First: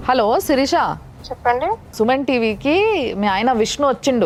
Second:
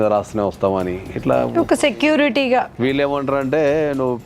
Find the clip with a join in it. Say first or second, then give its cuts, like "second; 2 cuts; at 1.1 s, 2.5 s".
second; 1 cut; at 2.7 s